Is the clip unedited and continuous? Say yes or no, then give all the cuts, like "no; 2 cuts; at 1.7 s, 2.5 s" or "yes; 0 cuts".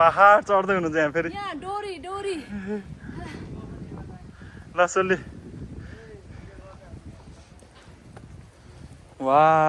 yes; 0 cuts